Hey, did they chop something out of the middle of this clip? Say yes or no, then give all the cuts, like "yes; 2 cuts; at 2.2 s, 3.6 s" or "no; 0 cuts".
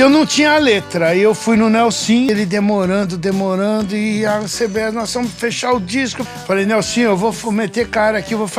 yes; 2 cuts; at 2.3 s, 6.2 s